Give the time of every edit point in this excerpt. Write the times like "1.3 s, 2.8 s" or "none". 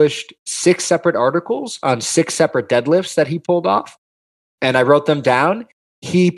none